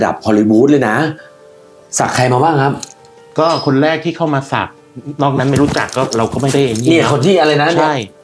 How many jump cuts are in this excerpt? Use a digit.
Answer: 0